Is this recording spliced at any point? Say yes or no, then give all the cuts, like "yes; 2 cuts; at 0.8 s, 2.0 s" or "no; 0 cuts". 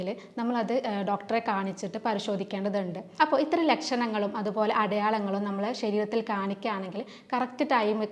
yes; 1 cut; at 3.0 s